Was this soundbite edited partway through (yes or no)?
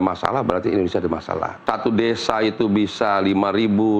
yes